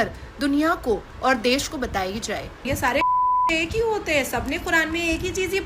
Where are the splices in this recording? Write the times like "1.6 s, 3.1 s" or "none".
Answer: 2.4 s